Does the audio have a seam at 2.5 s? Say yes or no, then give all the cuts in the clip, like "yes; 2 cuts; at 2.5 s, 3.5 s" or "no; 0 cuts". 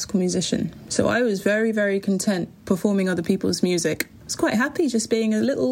no; 1 cut; at 4.1 s